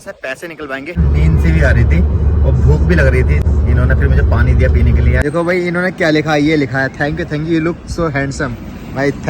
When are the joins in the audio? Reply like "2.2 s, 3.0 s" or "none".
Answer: 1.0 s, 3.4 s, 5.2 s